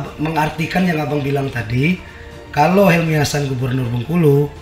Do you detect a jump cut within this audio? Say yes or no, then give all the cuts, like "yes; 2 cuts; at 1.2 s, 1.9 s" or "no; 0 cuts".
no; 0 cuts